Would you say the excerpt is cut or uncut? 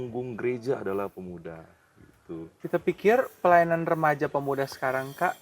cut